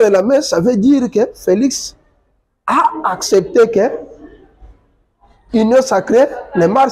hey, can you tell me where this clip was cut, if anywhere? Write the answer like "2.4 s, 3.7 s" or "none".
none